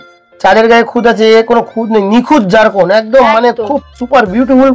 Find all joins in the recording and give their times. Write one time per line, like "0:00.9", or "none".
none